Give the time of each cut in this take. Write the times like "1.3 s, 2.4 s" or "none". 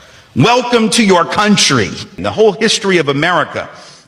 2.1 s

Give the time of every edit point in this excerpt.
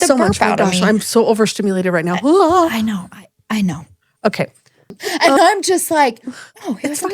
5.1 s

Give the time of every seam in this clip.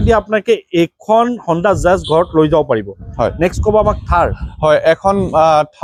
none

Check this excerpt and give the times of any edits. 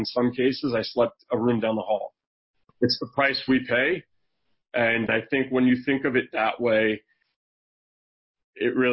1.2 s, 2.7 s, 5.1 s

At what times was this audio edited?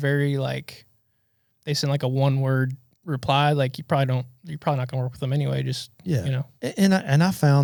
none

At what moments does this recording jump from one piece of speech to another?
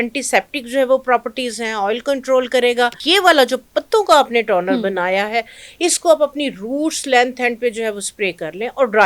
3.0 s

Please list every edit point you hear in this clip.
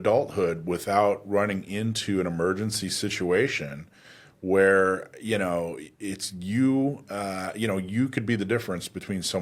none

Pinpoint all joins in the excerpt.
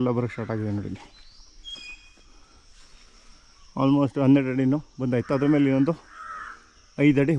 none

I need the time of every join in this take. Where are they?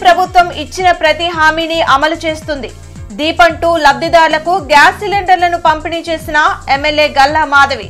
none

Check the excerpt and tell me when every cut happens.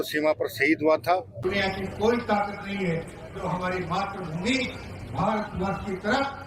1.3 s

